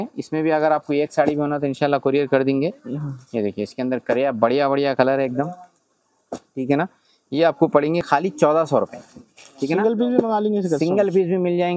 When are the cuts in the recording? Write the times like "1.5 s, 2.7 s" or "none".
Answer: none